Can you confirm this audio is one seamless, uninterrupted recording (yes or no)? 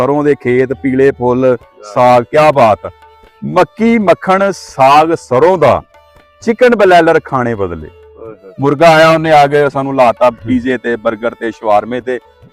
yes